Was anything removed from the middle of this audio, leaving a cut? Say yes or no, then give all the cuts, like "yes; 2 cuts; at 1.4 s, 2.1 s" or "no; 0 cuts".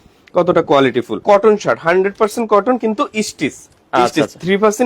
yes; 1 cut; at 1.2 s